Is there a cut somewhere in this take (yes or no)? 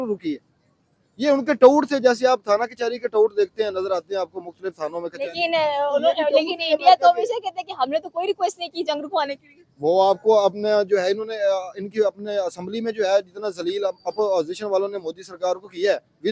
no